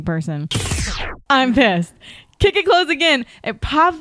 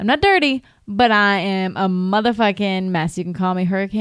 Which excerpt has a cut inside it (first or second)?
first